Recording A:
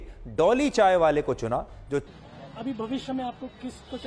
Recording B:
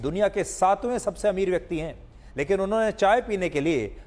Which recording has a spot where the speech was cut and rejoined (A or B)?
A